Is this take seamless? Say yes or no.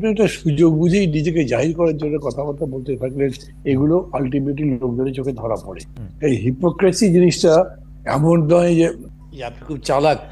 no